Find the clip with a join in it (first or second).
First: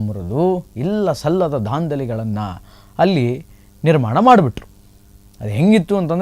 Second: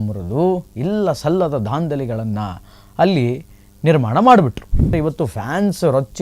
second